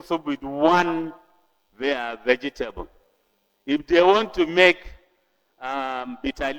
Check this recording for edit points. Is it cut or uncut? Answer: uncut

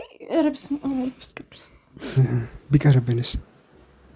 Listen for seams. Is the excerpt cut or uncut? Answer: cut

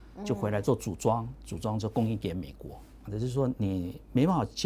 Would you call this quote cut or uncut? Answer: cut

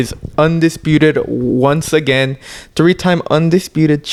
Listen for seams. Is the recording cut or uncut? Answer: uncut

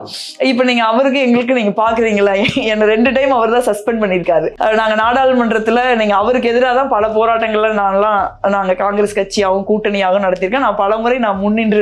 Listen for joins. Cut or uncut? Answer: uncut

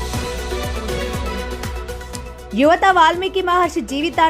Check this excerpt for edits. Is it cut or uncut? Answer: cut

